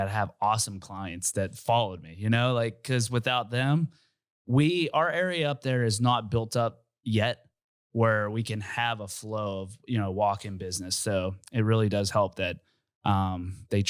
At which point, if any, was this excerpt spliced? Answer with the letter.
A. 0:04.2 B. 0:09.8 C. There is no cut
C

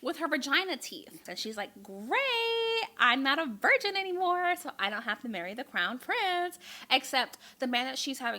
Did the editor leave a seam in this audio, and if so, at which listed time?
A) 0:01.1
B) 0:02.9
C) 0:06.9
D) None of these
A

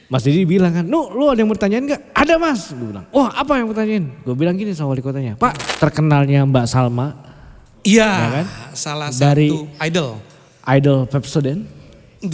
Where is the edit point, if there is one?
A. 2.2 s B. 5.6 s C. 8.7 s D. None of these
B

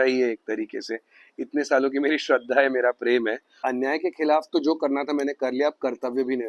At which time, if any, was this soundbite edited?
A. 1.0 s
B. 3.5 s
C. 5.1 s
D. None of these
B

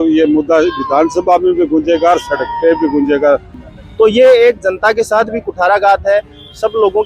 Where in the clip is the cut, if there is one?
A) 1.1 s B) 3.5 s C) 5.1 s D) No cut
B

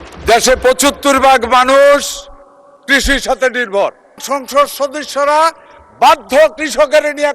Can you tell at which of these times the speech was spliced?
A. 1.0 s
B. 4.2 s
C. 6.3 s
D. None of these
B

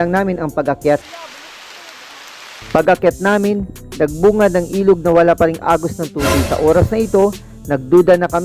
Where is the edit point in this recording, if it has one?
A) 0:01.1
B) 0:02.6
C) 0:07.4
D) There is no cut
A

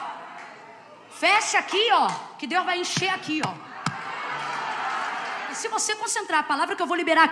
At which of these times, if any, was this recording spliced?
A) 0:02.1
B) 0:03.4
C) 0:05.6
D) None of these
C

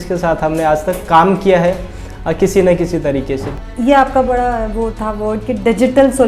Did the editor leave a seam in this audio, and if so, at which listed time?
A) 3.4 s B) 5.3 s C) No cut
A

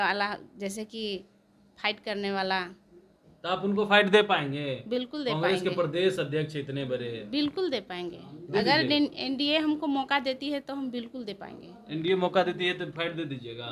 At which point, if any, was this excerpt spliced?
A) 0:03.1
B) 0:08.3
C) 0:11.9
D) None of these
D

